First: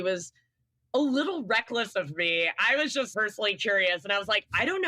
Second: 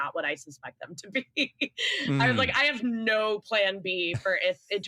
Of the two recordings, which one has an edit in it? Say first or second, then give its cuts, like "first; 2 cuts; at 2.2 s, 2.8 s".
first; 1 cut; at 3.1 s